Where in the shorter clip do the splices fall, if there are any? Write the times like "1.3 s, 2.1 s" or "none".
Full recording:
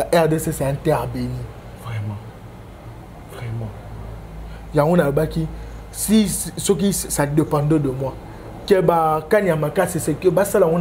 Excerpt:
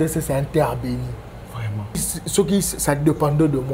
2.1 s